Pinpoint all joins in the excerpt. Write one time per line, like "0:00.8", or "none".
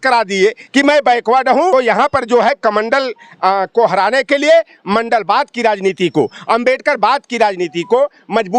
0:01.7